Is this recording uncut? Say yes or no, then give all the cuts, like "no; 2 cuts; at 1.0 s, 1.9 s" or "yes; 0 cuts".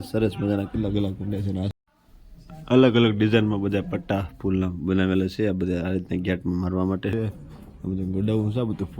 no; 2 cuts; at 1.7 s, 7.1 s